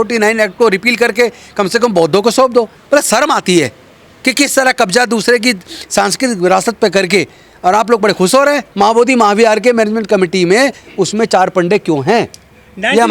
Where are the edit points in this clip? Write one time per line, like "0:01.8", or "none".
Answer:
0:02.8
0:08.7